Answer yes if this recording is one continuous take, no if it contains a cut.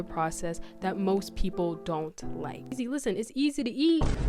no